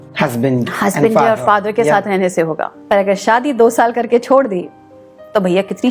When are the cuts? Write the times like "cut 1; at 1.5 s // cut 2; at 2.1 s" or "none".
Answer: cut 1; at 2.7 s